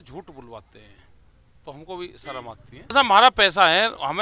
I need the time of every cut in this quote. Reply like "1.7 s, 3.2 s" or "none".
2.9 s